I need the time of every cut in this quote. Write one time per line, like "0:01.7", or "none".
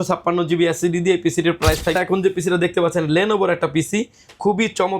0:01.9